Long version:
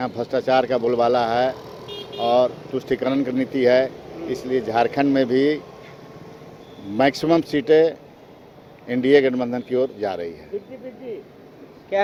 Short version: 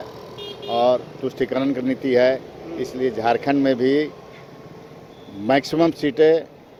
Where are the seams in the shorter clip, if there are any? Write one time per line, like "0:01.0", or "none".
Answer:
none